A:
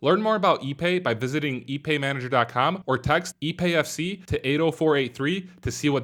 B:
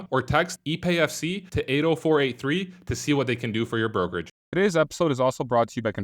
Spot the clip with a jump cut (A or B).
B